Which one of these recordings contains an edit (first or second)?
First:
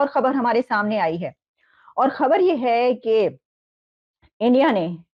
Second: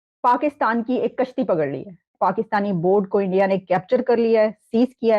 second